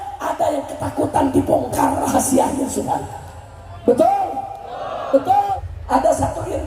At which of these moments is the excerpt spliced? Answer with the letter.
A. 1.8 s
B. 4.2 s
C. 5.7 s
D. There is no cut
C